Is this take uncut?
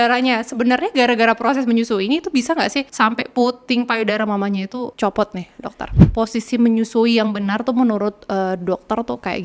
no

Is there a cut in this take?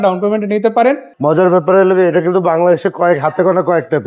yes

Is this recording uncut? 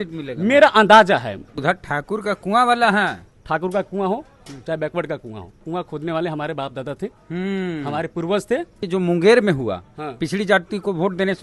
no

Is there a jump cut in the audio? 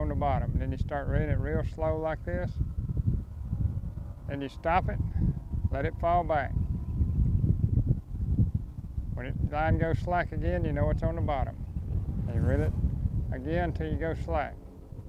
no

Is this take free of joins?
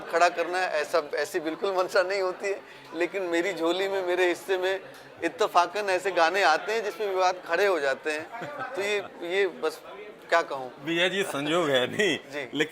yes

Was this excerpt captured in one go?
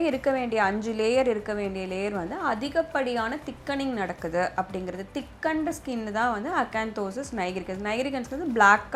yes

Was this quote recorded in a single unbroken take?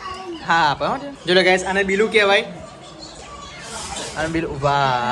no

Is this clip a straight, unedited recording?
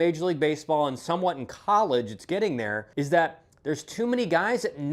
no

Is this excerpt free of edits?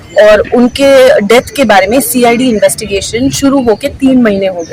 yes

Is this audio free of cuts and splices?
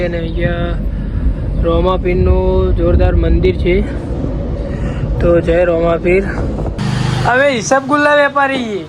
no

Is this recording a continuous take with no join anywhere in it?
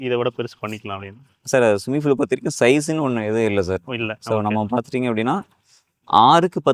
yes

